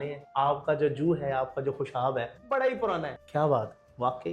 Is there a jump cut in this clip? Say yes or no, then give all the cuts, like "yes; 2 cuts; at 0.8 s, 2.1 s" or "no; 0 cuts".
yes; 1 cut; at 3.2 s